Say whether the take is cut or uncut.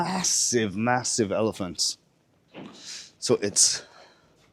uncut